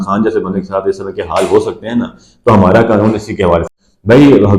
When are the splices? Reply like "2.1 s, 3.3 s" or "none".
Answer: 3.6 s